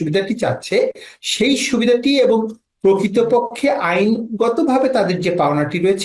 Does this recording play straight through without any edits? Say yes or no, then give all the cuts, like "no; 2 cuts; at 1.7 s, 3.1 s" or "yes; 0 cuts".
yes; 0 cuts